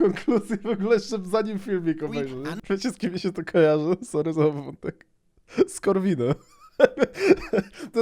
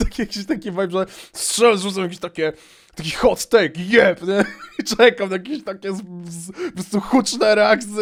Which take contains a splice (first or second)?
first